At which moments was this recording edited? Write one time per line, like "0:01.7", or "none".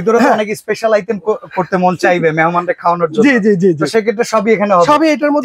none